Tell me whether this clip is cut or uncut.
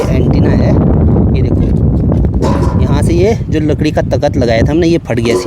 uncut